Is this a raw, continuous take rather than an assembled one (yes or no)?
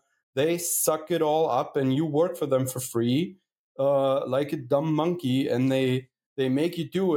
yes